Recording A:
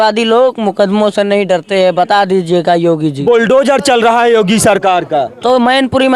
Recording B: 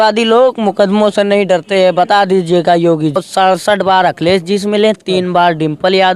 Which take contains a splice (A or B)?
B